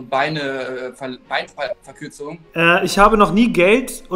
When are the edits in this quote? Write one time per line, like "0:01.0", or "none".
0:02.4